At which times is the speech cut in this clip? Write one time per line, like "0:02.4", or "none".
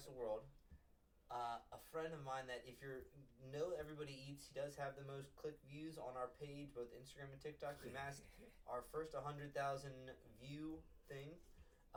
none